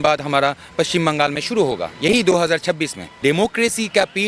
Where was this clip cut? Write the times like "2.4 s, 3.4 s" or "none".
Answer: 3.2 s